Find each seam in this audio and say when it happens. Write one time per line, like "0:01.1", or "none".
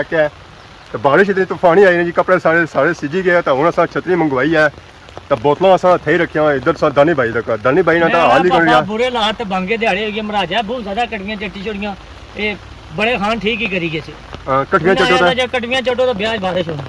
none